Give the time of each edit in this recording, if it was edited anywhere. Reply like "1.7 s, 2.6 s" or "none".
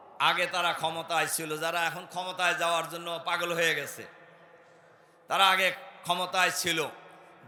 none